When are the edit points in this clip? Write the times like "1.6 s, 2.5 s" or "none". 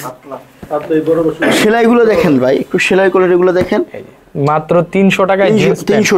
none